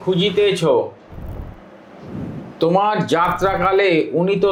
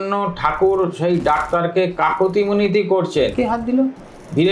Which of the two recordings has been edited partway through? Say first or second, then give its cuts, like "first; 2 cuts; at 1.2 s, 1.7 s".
second; 1 cut; at 3.3 s